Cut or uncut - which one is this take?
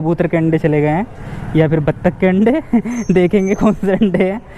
uncut